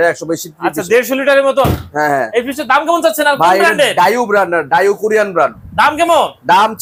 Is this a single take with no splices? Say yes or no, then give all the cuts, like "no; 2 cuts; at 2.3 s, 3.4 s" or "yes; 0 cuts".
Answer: yes; 0 cuts